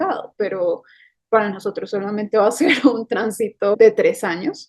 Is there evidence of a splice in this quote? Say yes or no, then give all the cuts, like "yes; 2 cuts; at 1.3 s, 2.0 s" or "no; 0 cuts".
yes; 1 cut; at 3.7 s